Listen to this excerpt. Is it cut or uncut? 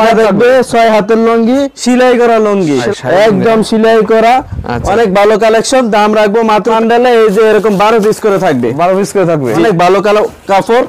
cut